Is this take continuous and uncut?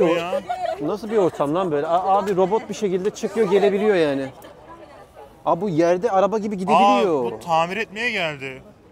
yes; 0 cuts

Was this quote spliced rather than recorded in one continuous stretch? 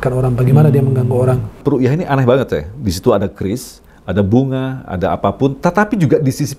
yes; 1 cut; at 1.6 s

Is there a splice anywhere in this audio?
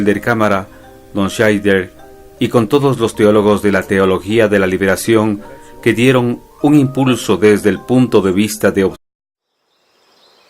no; 0 cuts

